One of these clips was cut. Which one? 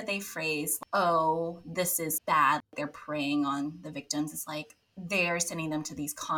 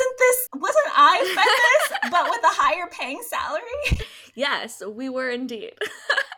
second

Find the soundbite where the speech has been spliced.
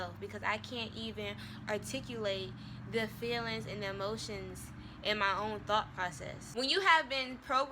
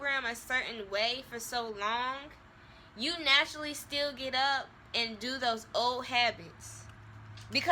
first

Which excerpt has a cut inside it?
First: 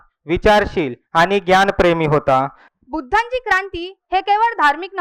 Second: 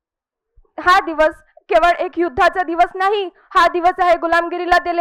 first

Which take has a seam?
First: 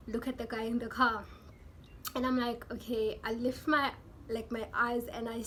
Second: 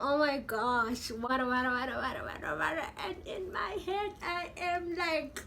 second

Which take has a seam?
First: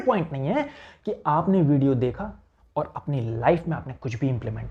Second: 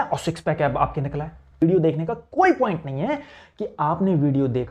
second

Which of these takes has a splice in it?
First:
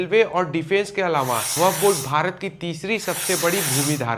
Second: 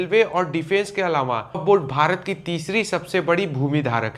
second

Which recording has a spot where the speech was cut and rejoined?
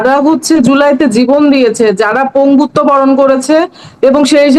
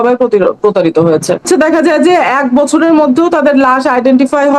second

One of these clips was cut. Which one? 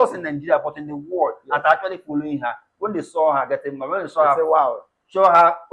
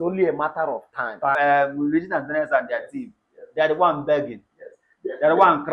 second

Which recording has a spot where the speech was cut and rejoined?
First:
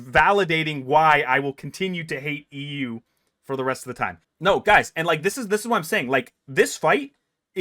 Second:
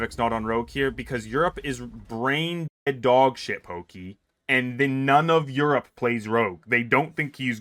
first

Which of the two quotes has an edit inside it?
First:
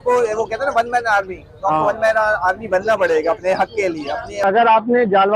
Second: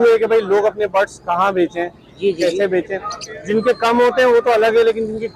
first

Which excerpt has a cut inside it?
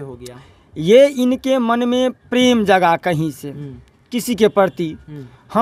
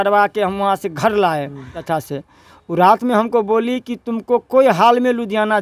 second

